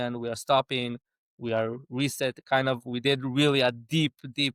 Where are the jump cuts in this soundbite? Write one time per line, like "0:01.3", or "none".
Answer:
none